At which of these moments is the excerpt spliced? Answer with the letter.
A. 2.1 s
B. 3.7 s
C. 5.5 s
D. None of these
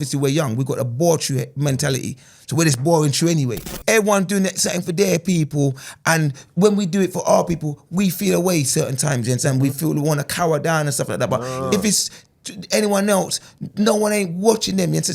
B